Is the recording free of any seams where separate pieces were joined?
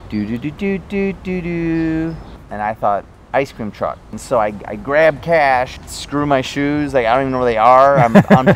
no; 3 cuts; at 2.3 s, 4.2 s, 5.8 s

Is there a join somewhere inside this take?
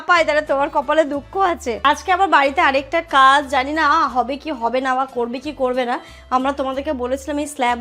yes; 1 cut; at 1.8 s

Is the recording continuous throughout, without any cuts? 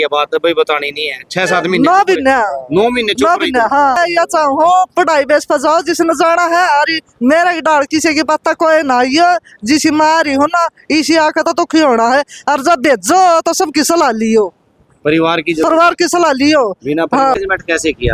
no; 2 cuts; at 4.0 s, 17.4 s

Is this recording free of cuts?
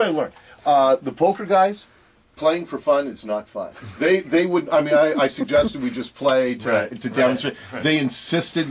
yes; 0 cuts

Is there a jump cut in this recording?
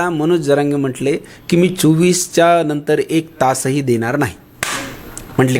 no; 0 cuts

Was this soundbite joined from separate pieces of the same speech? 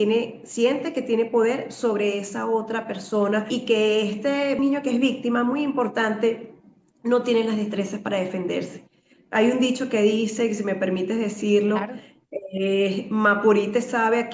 yes; 2 cuts; at 3.5 s, 4.6 s

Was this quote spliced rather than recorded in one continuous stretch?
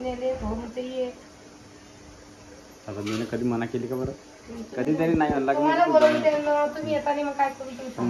no; 0 cuts

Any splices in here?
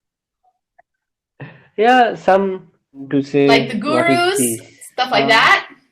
yes; 1 cut; at 3.1 s

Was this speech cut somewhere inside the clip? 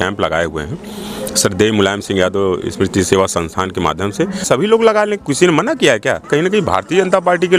yes; 2 cuts; at 4.4 s, 6.3 s

